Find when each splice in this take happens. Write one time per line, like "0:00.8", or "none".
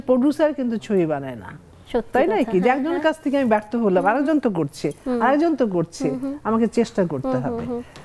none